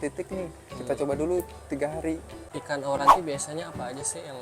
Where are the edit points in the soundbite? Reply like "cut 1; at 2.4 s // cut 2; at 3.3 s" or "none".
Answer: cut 1; at 2.5 s